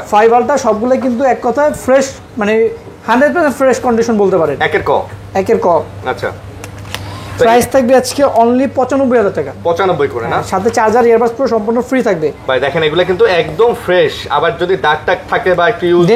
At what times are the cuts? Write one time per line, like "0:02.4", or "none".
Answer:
none